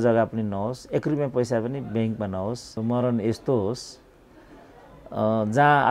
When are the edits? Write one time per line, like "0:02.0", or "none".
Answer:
0:02.7